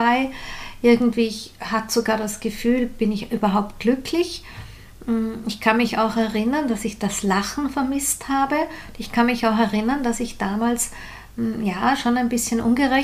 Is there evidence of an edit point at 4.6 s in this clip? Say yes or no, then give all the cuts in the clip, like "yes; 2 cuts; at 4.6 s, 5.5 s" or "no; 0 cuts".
no; 0 cuts